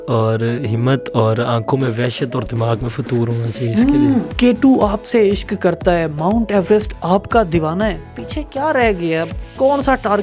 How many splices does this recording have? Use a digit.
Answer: 0